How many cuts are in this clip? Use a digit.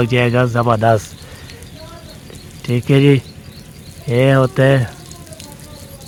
0